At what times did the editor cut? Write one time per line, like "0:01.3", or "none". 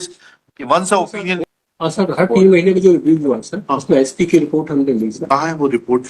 0:01.4